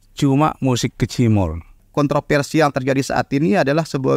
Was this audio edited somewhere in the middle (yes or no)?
yes